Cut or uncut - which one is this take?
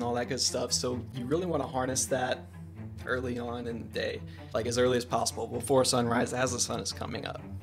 uncut